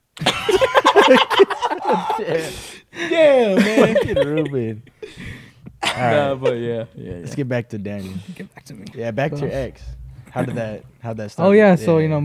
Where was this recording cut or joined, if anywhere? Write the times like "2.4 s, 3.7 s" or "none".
none

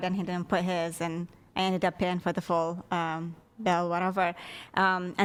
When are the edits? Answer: none

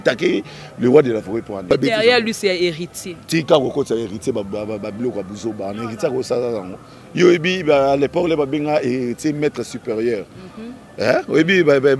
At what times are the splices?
1.7 s

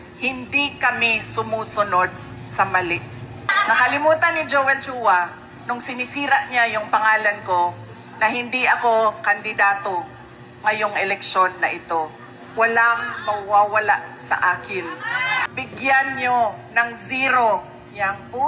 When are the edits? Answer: 3.6 s, 15.4 s

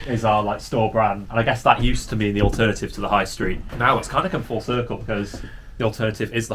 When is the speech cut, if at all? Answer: 1.2 s, 3.7 s

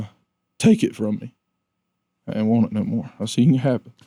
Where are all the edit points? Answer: none

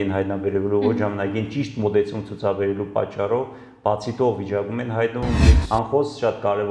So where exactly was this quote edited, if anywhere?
5.5 s

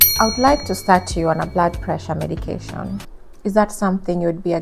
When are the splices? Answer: 3.0 s

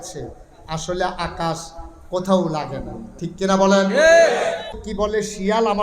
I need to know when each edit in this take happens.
4.8 s

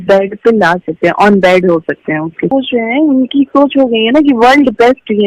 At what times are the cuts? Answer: 2.5 s

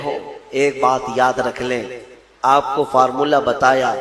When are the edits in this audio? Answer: 2.1 s

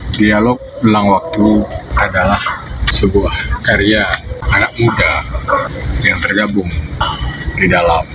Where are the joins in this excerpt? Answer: 1.9 s, 2.9 s, 4.4 s, 5.8 s, 7.0 s

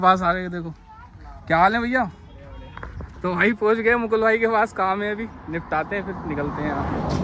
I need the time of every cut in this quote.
none

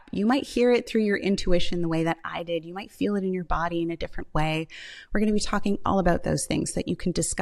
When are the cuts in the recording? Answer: none

